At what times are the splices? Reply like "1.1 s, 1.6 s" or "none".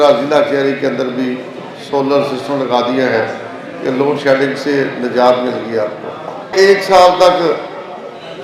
6.5 s